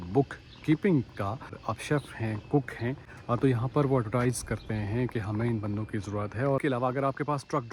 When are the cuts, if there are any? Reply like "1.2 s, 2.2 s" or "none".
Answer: 1.6 s, 3.1 s, 6.6 s